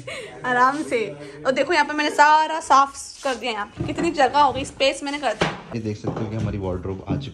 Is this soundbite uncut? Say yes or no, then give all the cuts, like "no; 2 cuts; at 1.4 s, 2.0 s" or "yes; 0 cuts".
yes; 0 cuts